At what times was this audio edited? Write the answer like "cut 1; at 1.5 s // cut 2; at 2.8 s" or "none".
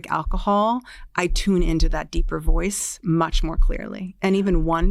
none